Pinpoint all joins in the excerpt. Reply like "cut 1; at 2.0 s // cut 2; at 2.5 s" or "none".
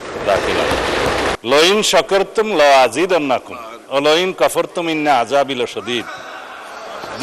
cut 1; at 1.3 s